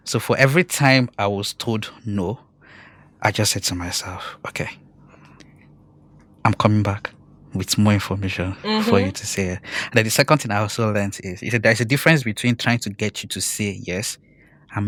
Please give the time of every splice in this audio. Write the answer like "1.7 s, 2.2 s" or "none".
none